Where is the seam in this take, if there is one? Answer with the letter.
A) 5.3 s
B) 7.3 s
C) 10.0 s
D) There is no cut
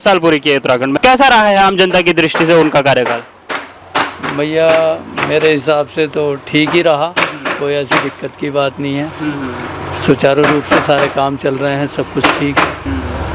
D